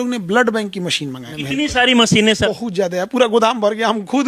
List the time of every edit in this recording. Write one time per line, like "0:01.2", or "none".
0:01.3
0:02.5